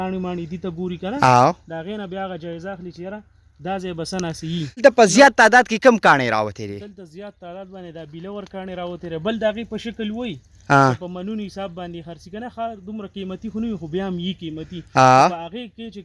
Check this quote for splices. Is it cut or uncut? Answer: cut